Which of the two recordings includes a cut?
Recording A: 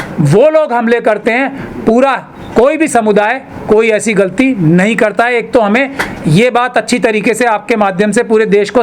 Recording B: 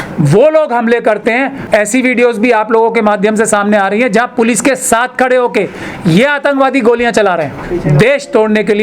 B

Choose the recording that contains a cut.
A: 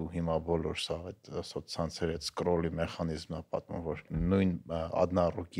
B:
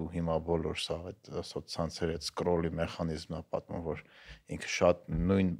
A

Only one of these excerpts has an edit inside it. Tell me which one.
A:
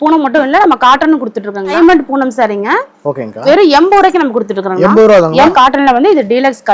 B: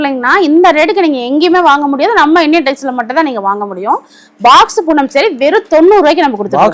A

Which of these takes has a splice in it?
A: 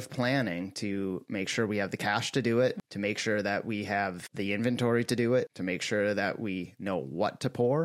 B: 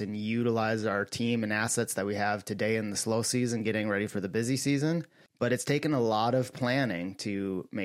A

